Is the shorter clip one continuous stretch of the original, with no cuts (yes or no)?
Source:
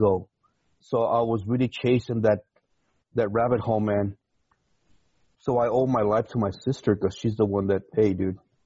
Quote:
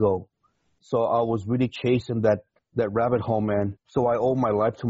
no